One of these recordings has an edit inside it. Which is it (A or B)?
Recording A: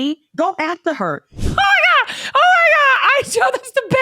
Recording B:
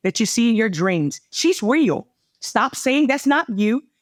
A